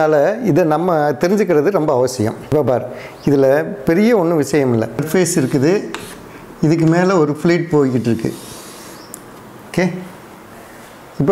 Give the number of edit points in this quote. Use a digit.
2